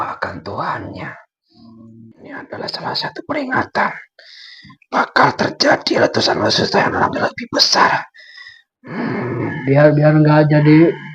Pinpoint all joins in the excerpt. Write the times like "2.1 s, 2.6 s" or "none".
2.2 s